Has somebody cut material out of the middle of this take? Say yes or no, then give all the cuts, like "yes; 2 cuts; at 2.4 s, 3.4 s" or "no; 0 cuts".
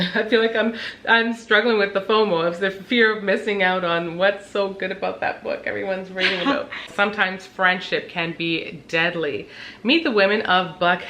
yes; 1 cut; at 6.9 s